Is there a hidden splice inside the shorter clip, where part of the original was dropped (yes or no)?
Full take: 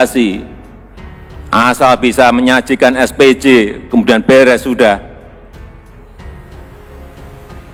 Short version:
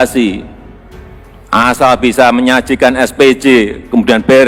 no